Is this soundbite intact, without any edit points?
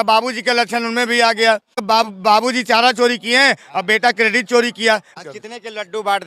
no; 2 cuts; at 1.8 s, 5.1 s

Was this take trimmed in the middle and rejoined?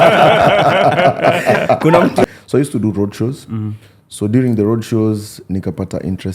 yes; 1 cut; at 2.2 s

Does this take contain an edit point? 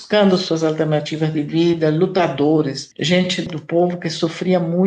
yes; 1 cut; at 3.5 s

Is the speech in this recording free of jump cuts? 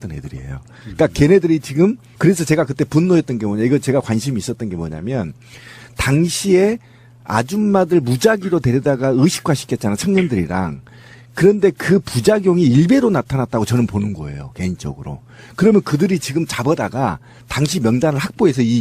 yes; 0 cuts

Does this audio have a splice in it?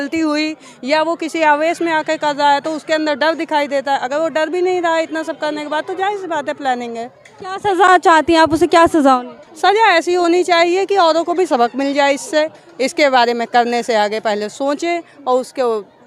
no; 0 cuts

